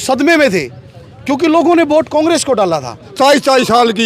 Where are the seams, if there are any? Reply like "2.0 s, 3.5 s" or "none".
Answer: 3.1 s